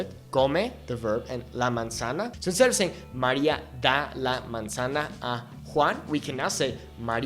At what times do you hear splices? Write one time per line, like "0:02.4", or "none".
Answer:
0:02.3